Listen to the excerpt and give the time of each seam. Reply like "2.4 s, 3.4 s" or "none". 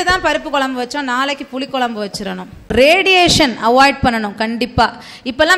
2.7 s